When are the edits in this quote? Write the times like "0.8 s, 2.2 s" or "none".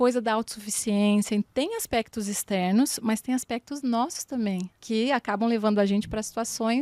1.5 s, 4.8 s